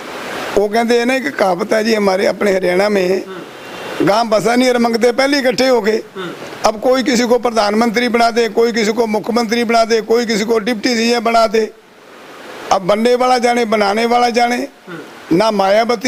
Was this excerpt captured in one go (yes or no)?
yes